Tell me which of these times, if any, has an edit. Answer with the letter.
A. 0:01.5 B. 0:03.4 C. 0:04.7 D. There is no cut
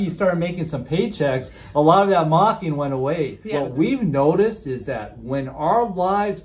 B